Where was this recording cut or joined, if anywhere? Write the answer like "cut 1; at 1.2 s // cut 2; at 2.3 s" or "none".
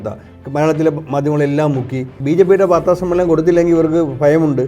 cut 1; at 2.1 s